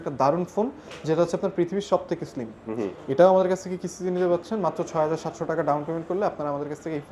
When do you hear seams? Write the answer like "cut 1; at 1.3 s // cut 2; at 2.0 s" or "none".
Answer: none